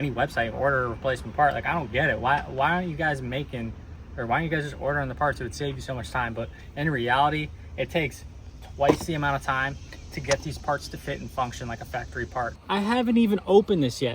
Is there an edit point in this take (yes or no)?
yes